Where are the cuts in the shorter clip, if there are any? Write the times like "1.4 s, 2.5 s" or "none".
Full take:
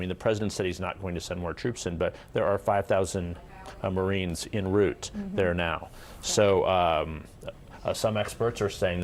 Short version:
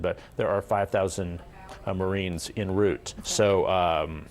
3.1 s